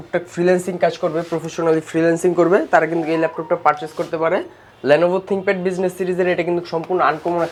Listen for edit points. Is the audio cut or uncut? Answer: uncut